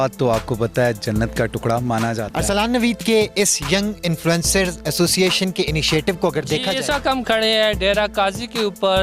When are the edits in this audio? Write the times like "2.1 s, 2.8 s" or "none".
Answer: 2.3 s, 6.7 s

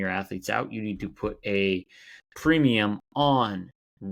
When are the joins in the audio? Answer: none

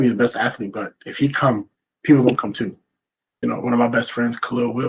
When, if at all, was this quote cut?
3.3 s

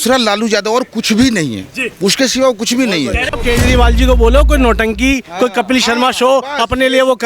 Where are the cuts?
3.4 s

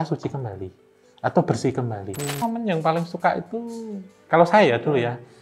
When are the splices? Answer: 2.4 s

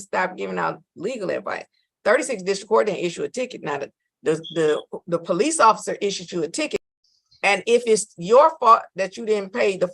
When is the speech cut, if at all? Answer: 6.8 s

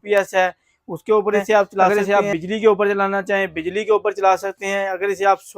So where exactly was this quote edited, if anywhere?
1.9 s

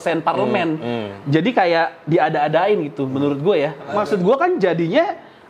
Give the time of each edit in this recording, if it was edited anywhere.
3.9 s

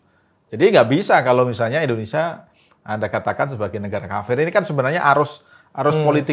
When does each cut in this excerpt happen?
none

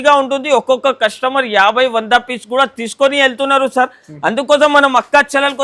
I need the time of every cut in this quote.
none

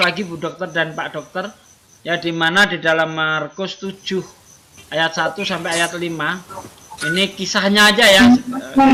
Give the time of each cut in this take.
none

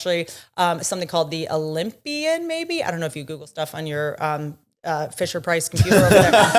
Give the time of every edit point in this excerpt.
none

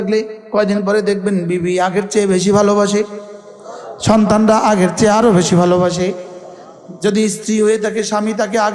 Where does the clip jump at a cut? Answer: none

